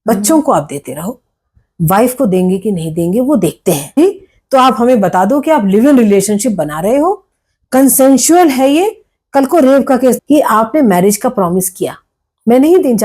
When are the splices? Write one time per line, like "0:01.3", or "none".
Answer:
0:04.0
0:10.2